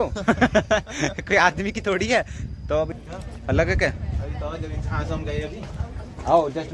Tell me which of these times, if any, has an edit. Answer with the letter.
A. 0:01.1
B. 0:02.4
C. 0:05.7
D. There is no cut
D